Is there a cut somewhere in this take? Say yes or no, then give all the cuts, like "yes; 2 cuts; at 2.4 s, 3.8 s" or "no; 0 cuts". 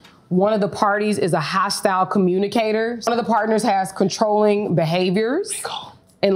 yes; 1 cut; at 3.1 s